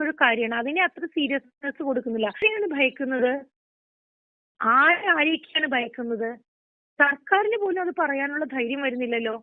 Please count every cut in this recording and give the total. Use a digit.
1